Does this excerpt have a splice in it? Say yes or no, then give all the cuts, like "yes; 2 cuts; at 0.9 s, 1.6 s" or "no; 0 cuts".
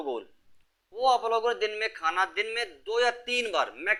no; 0 cuts